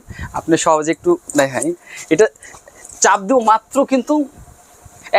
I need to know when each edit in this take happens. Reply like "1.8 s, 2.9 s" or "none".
none